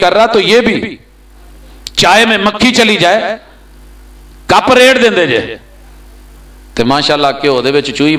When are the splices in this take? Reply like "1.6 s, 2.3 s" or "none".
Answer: none